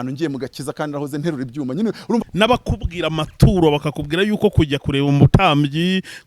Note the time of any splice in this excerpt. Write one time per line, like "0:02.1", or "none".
0:02.2